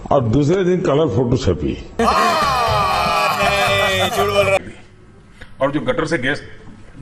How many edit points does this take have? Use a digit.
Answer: 1